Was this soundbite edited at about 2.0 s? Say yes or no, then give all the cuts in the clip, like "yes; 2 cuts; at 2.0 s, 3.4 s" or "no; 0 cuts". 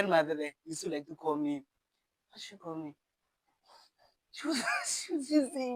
no; 0 cuts